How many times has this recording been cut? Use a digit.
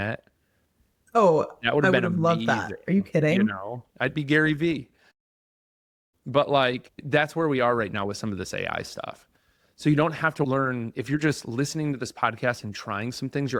0